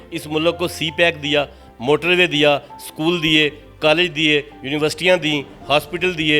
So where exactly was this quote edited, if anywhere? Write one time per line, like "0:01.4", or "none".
none